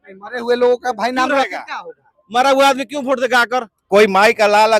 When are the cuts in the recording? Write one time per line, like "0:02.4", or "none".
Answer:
0:03.7